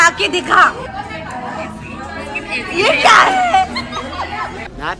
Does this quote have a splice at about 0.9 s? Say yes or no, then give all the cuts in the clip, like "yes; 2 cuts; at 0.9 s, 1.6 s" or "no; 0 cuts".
no; 0 cuts